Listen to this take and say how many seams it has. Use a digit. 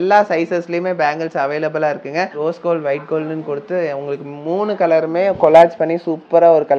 1